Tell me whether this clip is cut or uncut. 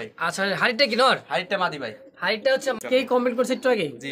cut